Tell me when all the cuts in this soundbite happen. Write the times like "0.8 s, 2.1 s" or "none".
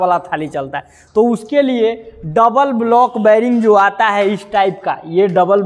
none

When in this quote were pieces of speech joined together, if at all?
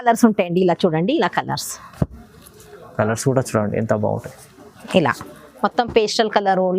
none

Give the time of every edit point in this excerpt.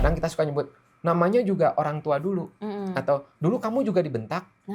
none

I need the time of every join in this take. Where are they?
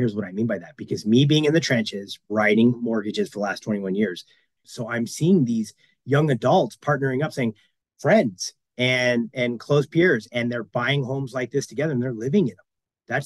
4.5 s, 7.7 s

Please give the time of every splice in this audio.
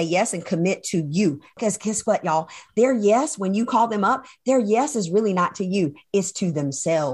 1.6 s

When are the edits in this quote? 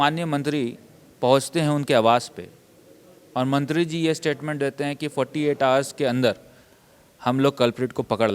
none

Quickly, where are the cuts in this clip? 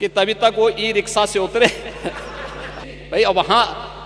2.8 s

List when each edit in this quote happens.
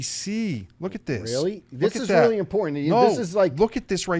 none

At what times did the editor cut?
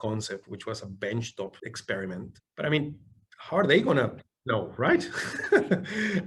1.7 s, 2.4 s

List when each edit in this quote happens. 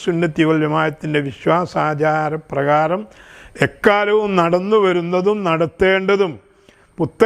none

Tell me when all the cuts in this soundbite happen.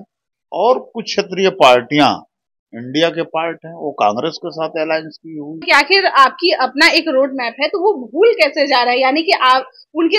5.6 s

